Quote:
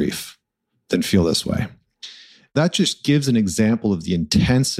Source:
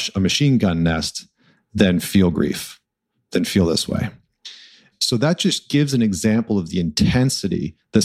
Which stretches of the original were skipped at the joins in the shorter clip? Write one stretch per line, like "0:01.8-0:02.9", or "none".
0:05.0-0:05.2